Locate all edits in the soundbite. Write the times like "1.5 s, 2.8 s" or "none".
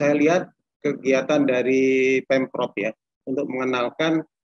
3.2 s